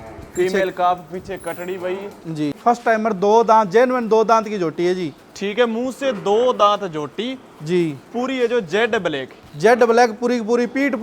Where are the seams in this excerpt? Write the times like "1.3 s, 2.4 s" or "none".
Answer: 2.6 s